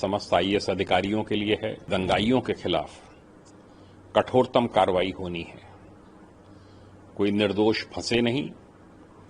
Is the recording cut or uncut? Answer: cut